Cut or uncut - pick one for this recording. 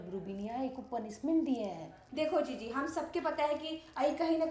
cut